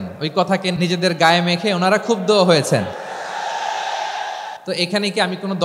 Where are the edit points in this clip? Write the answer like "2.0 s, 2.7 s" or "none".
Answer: 0.7 s, 4.6 s